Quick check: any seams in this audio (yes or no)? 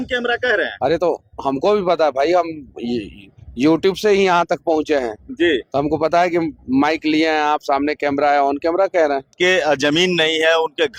no